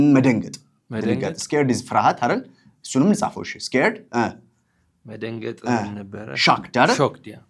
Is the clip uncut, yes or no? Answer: yes